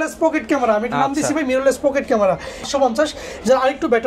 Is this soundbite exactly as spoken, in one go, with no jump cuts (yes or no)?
no